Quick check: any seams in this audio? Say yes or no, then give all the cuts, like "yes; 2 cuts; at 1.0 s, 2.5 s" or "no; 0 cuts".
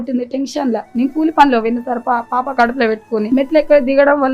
yes; 1 cut; at 3.3 s